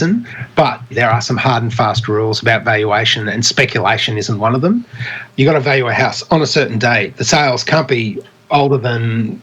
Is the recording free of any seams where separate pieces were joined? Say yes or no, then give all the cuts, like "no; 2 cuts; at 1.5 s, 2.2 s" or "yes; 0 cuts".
no; 2 cuts; at 0.9 s, 5.2 s